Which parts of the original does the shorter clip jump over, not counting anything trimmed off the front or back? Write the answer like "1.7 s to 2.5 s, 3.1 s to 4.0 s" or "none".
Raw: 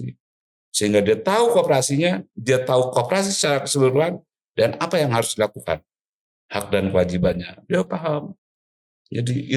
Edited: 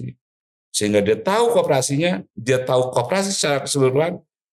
none